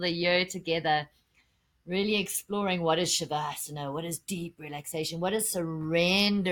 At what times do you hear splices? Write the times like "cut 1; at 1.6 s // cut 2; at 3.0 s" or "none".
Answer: none